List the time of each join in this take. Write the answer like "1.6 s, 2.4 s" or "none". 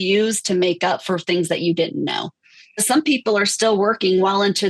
2.8 s

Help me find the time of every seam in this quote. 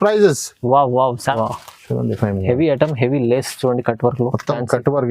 1.4 s

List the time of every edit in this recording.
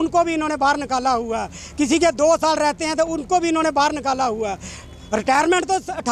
none

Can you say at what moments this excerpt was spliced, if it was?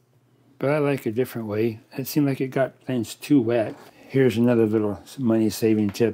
3.8 s

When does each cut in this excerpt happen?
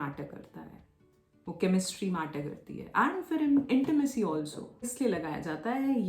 4.9 s

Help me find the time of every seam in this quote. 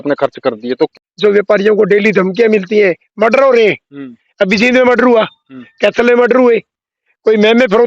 0.9 s

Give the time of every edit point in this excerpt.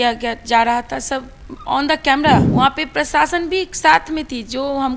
2.5 s

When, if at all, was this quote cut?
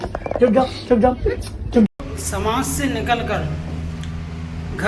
1.9 s

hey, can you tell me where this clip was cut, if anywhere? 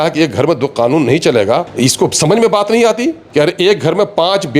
1.7 s, 3.2 s

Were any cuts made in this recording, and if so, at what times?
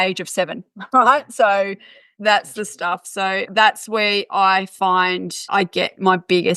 3.5 s, 5.5 s

